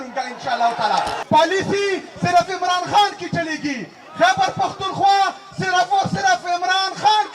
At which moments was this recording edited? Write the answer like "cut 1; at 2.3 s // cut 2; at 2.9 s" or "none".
cut 1; at 1.2 s